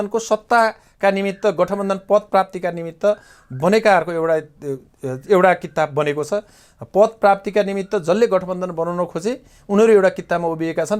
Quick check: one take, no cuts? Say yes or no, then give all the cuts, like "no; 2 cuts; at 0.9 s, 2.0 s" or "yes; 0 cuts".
yes; 0 cuts